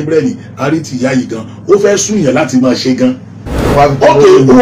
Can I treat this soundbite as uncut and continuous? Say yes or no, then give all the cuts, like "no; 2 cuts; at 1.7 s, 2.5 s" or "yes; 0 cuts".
no; 1 cut; at 3.7 s